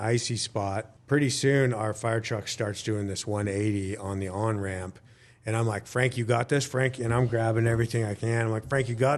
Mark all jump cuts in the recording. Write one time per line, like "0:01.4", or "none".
0:00.9